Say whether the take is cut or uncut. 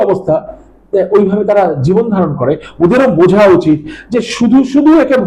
uncut